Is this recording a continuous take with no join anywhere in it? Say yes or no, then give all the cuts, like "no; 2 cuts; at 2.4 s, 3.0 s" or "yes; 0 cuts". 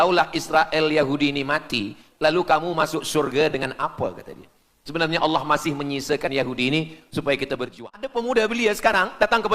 no; 1 cut; at 7.8 s